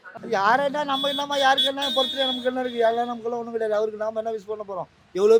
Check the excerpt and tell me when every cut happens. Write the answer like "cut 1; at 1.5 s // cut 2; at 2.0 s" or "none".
none

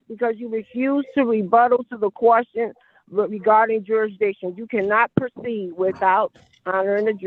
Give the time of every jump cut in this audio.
none

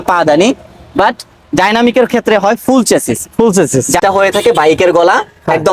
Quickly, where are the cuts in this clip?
cut 1; at 4.0 s

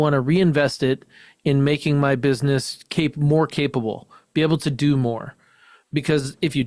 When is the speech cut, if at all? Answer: none

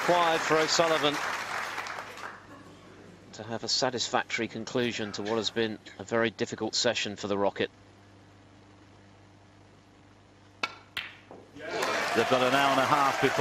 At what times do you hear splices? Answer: none

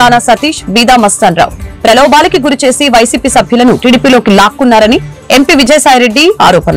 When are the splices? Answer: none

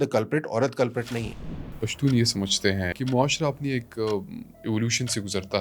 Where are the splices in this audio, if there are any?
cut 1; at 1.8 s // cut 2; at 2.9 s

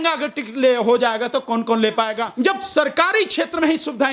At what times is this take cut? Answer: cut 1; at 2.2 s

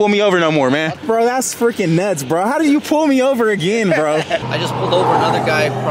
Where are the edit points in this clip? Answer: cut 1; at 0.9 s // cut 2; at 4.5 s

